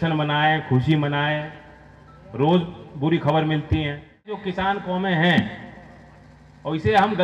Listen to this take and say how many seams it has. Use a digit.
1